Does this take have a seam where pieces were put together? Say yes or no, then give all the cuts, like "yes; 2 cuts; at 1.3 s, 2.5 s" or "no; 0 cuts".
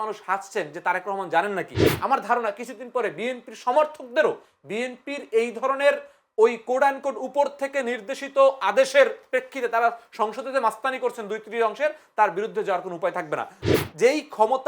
yes; 2 cuts; at 1.8 s, 13.6 s